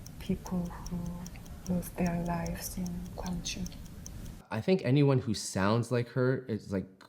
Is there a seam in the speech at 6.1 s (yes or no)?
no